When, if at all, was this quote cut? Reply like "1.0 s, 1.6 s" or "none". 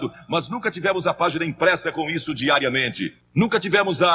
3.2 s